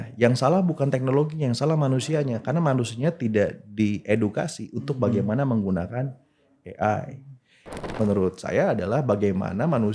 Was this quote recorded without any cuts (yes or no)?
no